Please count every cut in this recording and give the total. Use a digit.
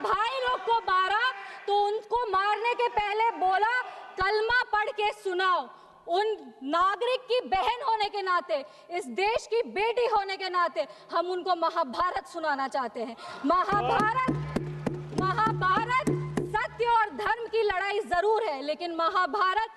0